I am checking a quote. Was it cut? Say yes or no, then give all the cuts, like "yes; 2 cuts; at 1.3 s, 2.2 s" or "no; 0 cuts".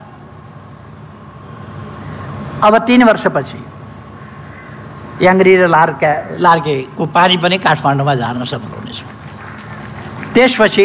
no; 0 cuts